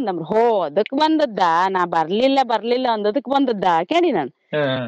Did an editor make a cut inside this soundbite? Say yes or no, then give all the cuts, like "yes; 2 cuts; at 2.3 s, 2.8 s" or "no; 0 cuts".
no; 0 cuts